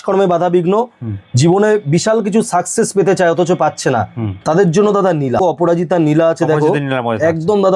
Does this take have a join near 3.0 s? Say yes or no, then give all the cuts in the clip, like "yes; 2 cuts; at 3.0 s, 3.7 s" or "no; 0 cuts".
no; 1 cut; at 5.4 s